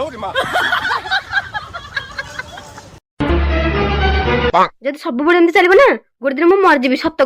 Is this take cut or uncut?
cut